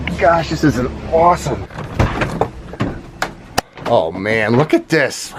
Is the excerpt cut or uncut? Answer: uncut